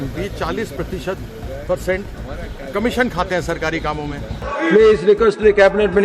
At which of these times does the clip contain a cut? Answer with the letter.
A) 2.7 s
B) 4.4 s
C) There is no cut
B